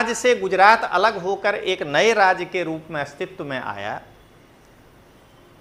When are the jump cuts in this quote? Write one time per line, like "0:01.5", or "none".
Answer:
none

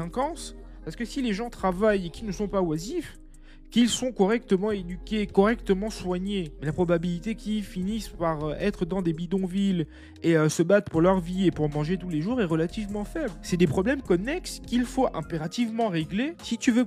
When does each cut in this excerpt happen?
none

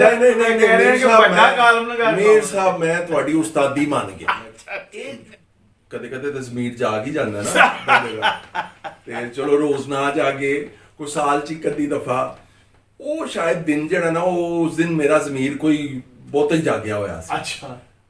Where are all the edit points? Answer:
0:04.9

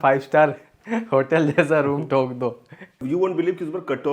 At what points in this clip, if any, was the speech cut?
0:03.0

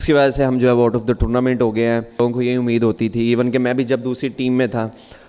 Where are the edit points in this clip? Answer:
0:02.2

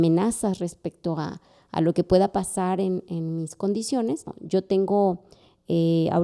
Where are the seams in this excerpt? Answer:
0:04.3

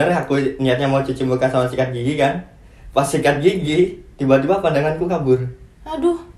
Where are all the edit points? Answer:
none

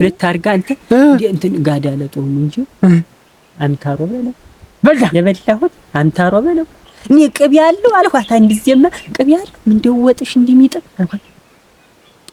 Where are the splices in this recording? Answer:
none

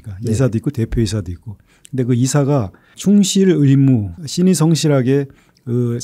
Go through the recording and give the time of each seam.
0:02.8
0:04.2

